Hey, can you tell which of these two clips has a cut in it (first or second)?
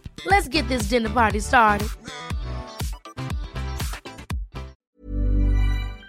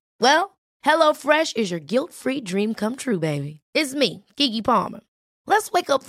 first